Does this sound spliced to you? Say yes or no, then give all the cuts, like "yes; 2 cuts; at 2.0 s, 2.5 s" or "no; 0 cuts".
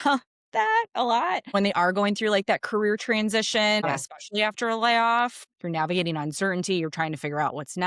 yes; 3 cuts; at 1.5 s, 3.8 s, 5.5 s